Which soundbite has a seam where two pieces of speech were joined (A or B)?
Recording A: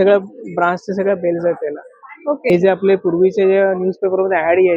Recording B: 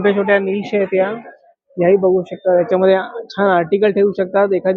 A